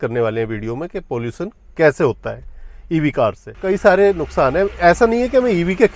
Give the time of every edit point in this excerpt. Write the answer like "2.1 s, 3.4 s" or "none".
3.5 s